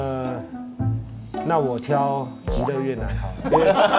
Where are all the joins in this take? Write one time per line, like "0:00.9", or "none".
none